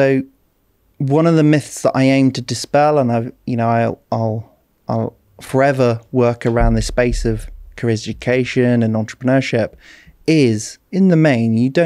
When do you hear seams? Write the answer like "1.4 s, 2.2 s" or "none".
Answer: 10.7 s